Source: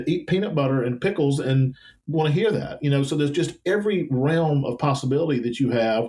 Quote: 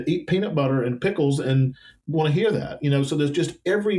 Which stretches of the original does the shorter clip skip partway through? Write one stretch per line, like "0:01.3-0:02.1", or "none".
none

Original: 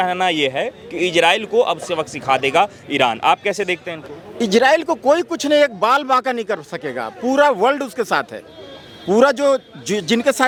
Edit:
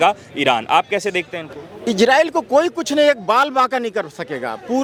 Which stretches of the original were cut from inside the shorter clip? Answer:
none

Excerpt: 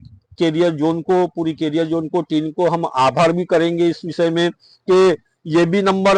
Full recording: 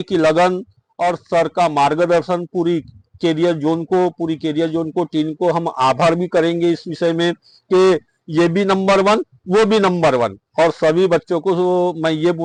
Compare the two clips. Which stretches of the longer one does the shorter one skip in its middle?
none

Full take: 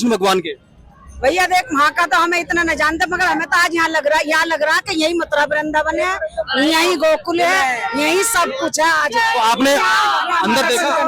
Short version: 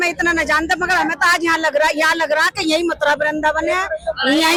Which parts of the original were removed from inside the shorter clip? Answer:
none

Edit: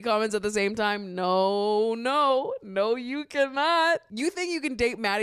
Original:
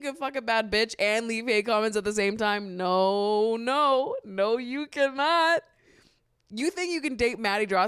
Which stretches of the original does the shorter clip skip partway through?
0:05.7-0:06.5

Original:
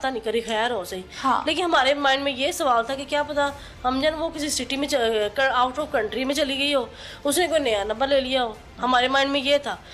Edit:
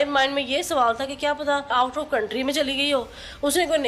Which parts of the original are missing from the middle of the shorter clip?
0:03.6-0:05.5

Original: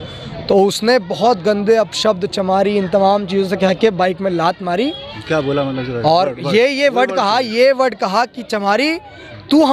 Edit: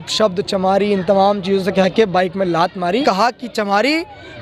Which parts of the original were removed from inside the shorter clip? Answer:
0:04.9-0:08.0

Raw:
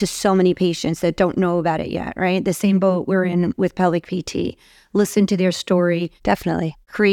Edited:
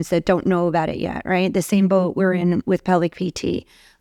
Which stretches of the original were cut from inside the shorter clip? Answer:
none

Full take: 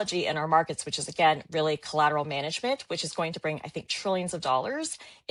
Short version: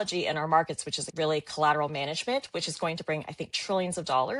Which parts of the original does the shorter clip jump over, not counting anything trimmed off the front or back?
0:01.1-0:01.4

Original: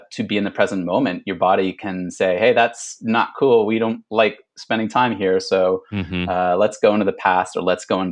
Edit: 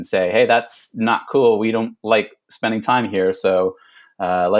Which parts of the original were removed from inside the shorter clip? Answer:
none

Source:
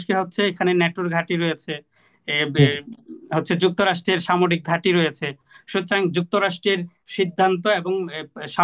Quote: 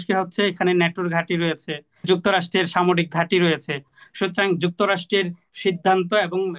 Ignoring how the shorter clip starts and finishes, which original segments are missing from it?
0:02.0-0:03.6

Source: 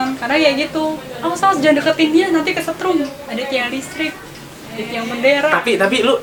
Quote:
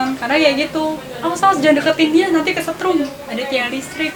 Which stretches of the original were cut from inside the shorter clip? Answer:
none

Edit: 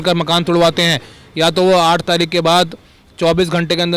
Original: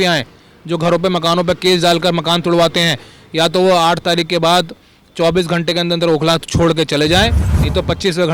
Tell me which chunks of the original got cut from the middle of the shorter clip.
none

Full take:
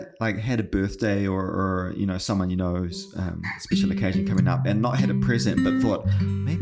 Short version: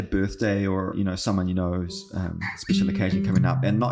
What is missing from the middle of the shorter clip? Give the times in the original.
0:01.5-0:01.9

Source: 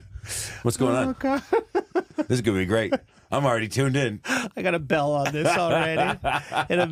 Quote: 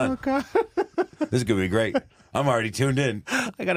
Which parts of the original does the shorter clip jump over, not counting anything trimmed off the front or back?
none

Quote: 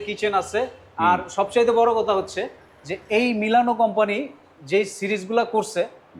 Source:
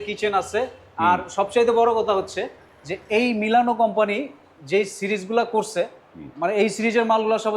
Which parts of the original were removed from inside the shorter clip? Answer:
none

